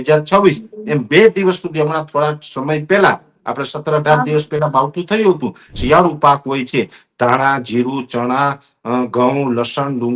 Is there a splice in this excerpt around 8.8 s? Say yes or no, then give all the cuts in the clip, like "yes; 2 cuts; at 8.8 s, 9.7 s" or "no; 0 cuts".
no; 1 cut; at 5.7 s